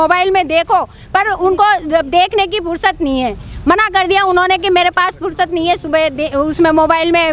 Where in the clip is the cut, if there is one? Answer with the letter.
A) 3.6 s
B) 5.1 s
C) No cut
C